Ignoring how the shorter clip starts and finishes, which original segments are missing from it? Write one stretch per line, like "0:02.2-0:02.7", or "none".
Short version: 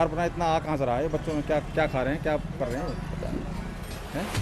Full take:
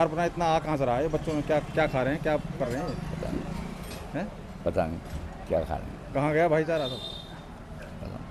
none